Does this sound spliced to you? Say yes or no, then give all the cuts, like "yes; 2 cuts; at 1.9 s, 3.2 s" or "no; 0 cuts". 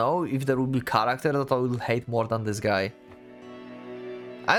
no; 0 cuts